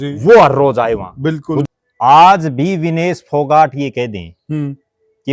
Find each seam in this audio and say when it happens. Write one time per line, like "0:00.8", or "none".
0:01.6